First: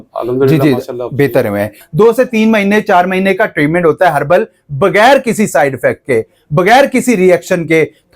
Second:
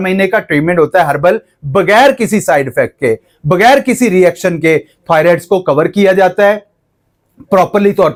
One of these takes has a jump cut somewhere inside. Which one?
first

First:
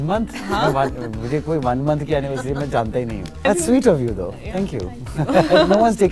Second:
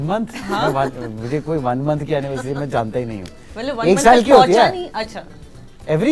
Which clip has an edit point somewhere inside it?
first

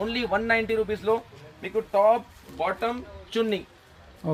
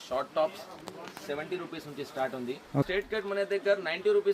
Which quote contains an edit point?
second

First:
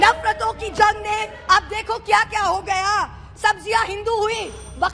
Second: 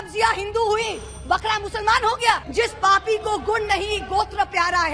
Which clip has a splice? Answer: second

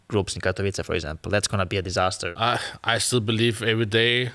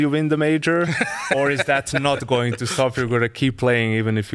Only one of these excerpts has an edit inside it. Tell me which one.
first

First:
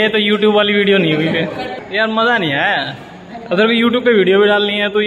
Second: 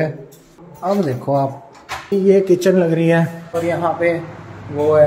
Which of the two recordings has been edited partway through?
second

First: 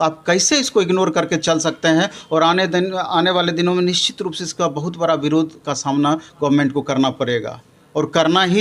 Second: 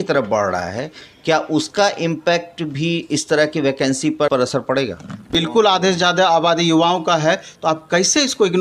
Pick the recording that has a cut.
second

